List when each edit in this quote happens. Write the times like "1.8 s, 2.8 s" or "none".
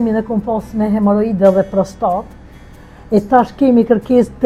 none